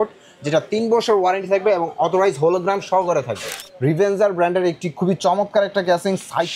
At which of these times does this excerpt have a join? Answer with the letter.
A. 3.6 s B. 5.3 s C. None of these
A